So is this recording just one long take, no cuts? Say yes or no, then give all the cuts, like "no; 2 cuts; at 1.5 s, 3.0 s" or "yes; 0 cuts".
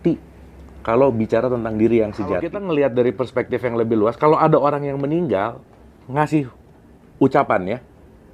no; 1 cut; at 2.6 s